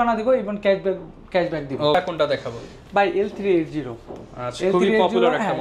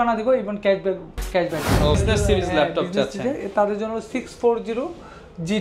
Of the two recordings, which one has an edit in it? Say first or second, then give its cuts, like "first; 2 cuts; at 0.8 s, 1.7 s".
second; 1 cut; at 1.9 s